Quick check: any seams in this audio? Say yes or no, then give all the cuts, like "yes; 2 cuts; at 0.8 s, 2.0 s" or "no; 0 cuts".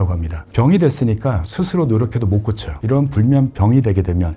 no; 0 cuts